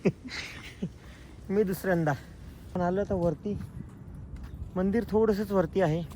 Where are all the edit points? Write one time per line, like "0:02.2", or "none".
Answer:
0:02.8